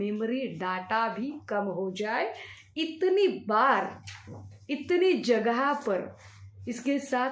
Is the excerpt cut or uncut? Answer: uncut